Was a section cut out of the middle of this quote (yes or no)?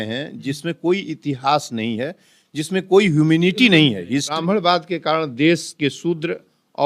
yes